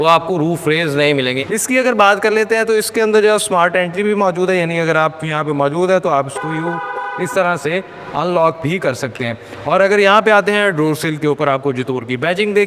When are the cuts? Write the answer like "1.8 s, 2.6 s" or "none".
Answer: none